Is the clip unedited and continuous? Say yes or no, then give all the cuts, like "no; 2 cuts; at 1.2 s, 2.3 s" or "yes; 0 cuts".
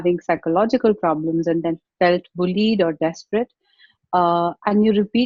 yes; 0 cuts